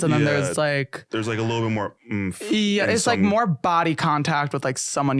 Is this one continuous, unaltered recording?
yes; 0 cuts

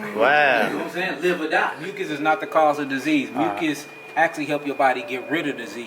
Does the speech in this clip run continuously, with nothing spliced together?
no; 1 cut; at 1.9 s

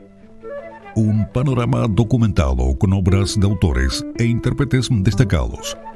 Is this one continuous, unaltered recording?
no; 1 cut; at 0.9 s

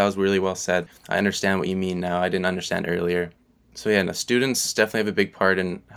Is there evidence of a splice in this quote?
yes; 2 cuts; at 0.9 s, 4.7 s

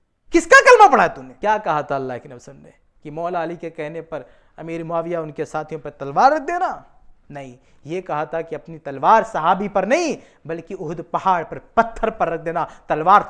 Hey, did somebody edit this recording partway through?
yes; 1 cut; at 1.3 s

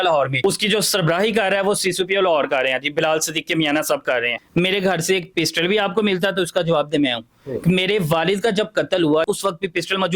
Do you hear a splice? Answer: yes; 2 cuts; at 4.4 s, 9.2 s

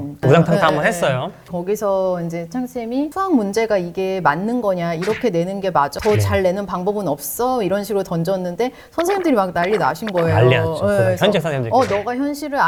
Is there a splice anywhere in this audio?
no; 0 cuts

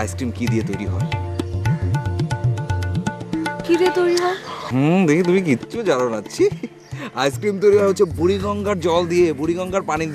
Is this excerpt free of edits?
no; 1 cut; at 4.3 s

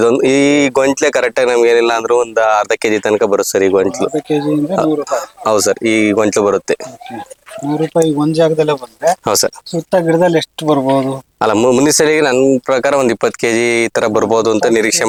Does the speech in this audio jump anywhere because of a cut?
no; 0 cuts

